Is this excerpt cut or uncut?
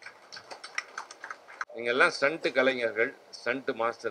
cut